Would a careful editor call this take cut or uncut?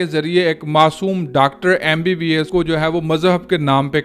cut